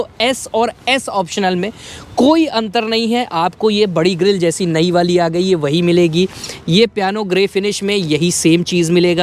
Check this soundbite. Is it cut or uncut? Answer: uncut